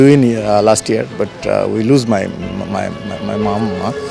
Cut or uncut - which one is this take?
uncut